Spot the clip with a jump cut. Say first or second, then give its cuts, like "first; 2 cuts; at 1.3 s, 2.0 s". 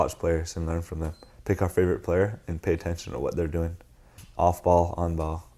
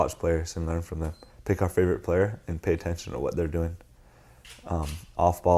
first; 1 cut; at 4.2 s